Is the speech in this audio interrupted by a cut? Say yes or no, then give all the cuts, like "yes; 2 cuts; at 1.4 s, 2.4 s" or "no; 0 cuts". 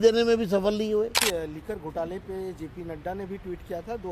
yes; 1 cut; at 1.2 s